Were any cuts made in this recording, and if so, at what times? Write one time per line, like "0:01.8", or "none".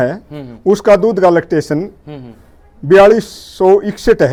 none